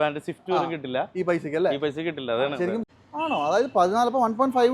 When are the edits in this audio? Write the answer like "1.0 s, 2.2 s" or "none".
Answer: 2.9 s